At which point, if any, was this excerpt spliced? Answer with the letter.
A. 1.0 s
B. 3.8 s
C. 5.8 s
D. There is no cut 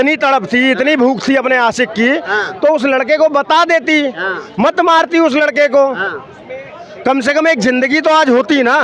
D